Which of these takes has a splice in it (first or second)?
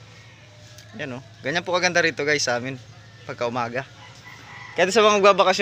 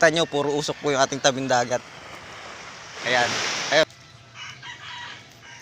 second